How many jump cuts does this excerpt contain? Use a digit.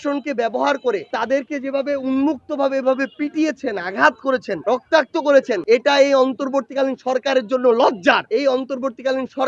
2